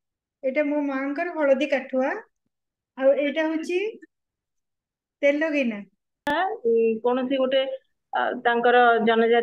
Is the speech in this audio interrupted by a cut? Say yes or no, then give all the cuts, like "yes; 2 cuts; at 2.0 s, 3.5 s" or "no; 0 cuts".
yes; 1 cut; at 6.3 s